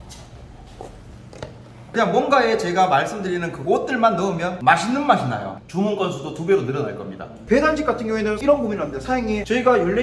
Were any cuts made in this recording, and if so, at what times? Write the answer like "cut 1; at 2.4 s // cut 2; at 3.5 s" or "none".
cut 1; at 1.9 s // cut 2; at 7.3 s